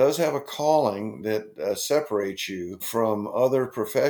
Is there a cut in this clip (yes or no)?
yes